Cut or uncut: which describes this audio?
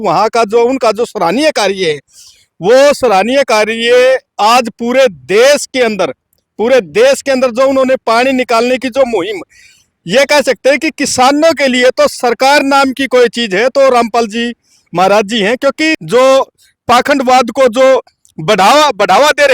cut